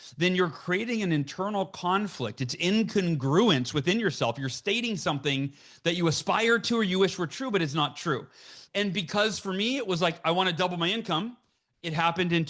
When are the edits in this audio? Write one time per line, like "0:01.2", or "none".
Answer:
0:08.5